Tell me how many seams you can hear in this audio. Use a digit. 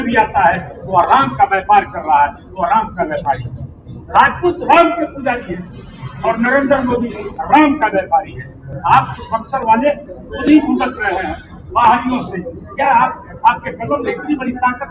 0